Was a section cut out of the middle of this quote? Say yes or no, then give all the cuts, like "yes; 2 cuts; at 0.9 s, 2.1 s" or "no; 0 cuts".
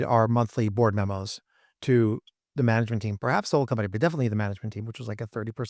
no; 0 cuts